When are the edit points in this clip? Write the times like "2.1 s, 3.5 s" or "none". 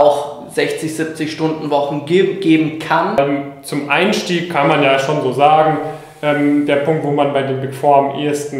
3.2 s